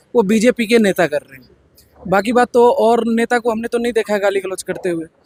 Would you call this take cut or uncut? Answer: uncut